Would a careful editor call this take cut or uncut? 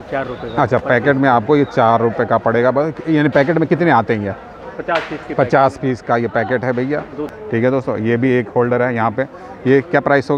cut